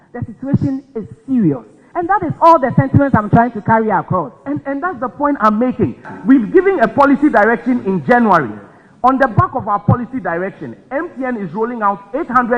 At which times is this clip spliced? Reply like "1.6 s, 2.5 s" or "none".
none